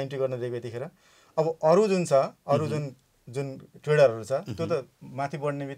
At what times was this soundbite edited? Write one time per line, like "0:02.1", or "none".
none

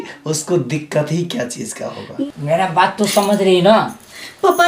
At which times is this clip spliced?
0:02.3

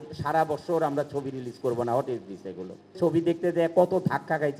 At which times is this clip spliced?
0:03.0

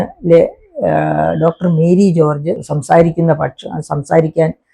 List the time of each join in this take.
0:02.7

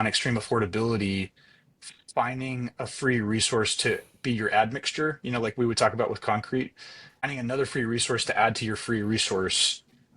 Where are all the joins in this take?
0:07.3

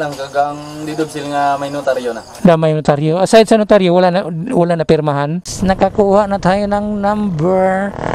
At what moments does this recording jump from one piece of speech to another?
0:05.5

